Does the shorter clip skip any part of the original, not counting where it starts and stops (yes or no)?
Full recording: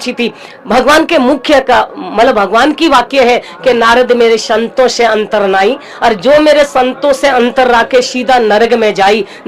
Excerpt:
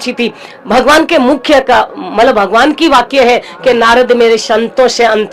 no